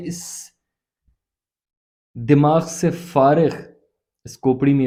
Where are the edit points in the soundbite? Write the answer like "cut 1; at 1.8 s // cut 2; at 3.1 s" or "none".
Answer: none